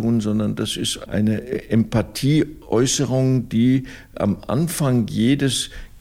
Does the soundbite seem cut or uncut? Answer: cut